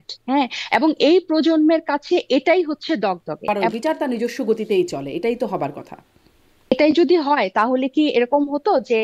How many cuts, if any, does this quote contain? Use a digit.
2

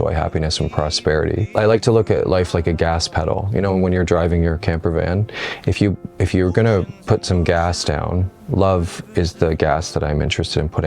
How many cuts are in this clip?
1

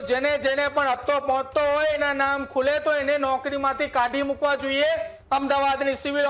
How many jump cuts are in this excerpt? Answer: 1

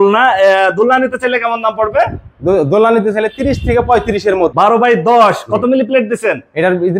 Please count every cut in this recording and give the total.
1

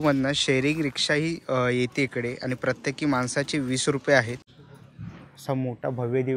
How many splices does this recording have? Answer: 1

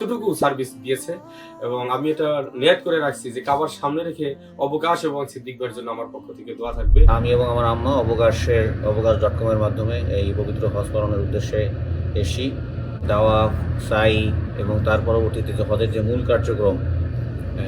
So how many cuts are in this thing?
2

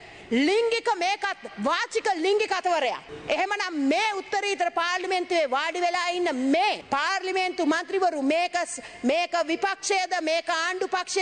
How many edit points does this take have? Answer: 2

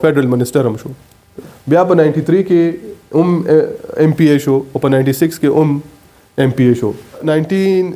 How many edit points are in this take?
2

